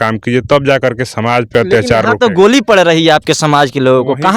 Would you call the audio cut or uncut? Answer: uncut